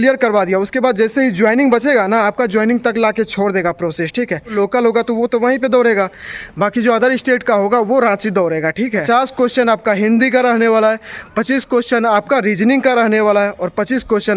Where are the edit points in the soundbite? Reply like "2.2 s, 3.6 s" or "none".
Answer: 4.5 s, 9.0 s